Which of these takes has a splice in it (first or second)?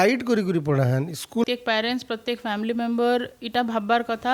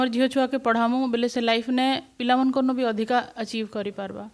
first